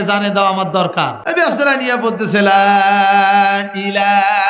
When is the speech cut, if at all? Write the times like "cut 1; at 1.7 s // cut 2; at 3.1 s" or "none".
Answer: cut 1; at 1.2 s